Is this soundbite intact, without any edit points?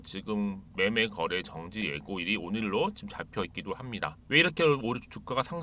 no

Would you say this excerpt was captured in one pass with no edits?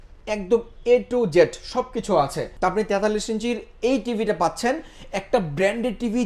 no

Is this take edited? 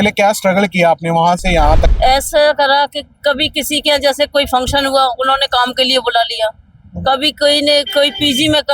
yes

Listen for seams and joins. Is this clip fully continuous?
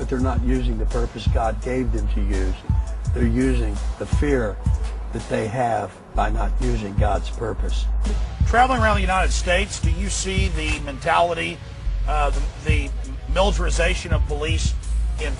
no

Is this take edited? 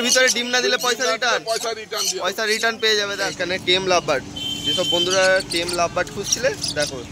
yes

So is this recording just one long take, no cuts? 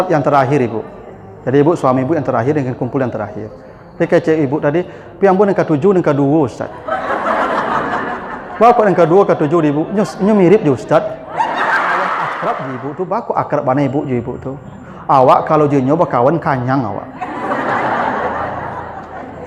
no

